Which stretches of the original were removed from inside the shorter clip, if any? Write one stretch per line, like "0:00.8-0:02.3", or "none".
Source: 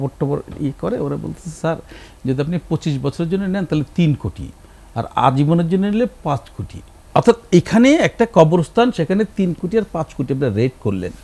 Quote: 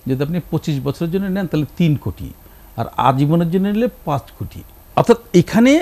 none